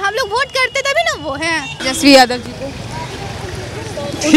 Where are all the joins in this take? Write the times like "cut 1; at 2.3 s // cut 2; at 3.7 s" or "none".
cut 1; at 1.8 s

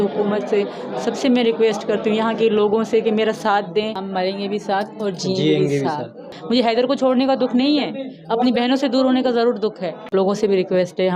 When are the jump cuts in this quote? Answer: cut 1; at 4.0 s // cut 2; at 6.3 s // cut 3; at 10.1 s

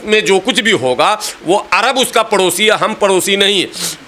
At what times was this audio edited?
none

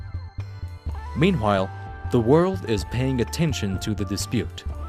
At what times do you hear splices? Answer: cut 1; at 2.2 s

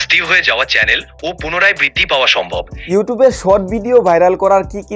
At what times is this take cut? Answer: cut 1; at 2.8 s

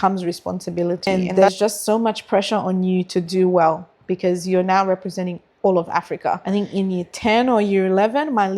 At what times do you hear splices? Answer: cut 1; at 1.1 s // cut 2; at 6.4 s

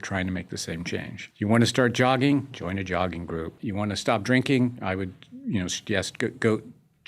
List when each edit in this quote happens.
cut 1; at 1.2 s // cut 2; at 3.6 s

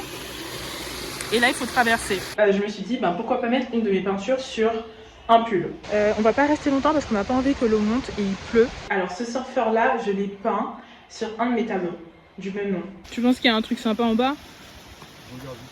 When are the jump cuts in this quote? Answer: cut 1; at 2.3 s // cut 2; at 5.8 s // cut 3; at 8.9 s // cut 4; at 12.9 s

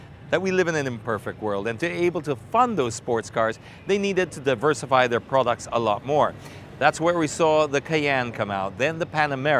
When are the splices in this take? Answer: cut 1; at 1.8 s

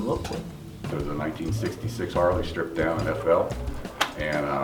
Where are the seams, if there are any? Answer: cut 1; at 0.9 s

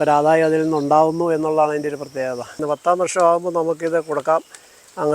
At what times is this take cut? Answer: cut 1; at 2.5 s

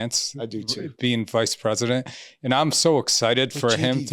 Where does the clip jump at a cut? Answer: none

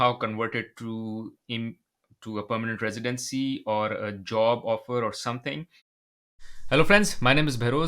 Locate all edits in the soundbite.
cut 1; at 6.0 s

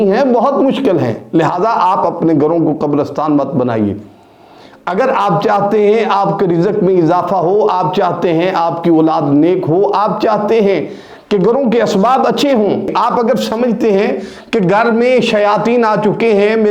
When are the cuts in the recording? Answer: cut 1; at 12.9 s

